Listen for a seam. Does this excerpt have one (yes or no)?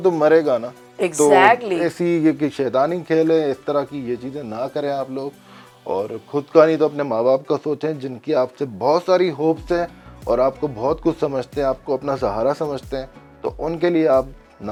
no